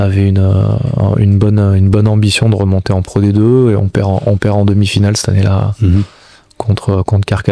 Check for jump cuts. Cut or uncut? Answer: uncut